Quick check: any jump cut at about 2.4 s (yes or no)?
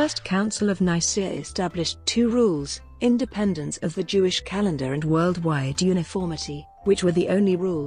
yes